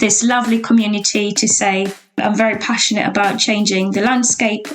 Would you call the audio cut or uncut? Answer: cut